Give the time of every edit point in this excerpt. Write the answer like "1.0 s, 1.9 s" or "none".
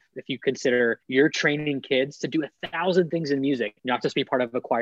1.0 s, 3.8 s